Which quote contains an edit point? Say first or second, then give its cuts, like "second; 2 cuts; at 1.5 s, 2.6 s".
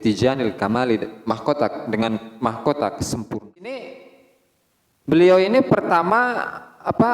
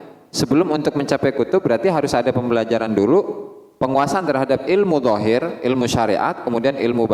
first; 1 cut; at 3.7 s